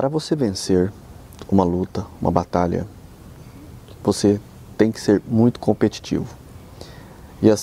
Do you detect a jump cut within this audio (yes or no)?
no